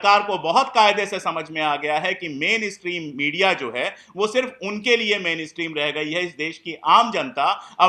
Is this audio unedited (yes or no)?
yes